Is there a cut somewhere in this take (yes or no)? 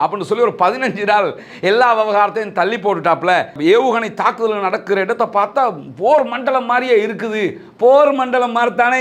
yes